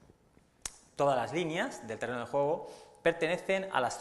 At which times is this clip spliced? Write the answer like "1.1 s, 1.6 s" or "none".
1.8 s